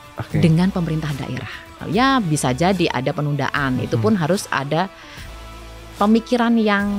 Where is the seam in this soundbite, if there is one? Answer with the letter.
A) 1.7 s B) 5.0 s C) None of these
A